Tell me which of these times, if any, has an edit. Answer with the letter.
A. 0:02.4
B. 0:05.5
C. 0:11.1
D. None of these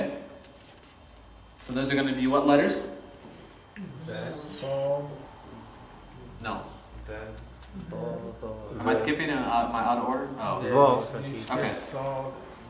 A